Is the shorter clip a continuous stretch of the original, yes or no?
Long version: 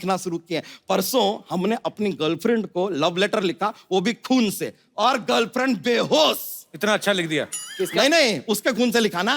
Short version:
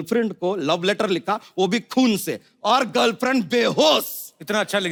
yes